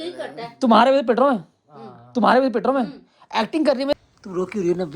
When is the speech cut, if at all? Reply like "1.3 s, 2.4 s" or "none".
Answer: 3.9 s